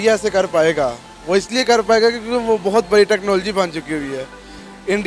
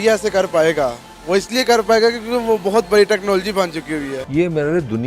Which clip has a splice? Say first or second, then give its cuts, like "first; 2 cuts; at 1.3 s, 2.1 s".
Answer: second; 1 cut; at 4.2 s